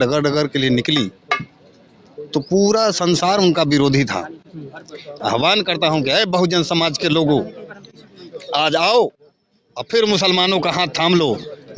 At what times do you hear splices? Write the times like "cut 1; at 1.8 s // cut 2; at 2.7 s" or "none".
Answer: cut 1; at 5.2 s